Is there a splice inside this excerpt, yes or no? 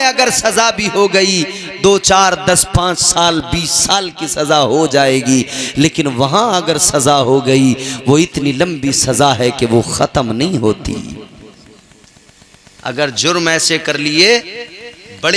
no